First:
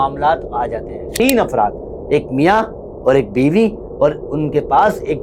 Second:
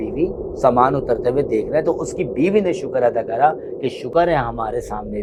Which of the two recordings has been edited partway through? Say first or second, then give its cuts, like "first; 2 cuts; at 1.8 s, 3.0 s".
first; 1 cut; at 1.0 s